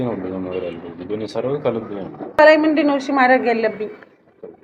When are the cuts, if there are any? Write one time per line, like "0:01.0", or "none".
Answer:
0:02.4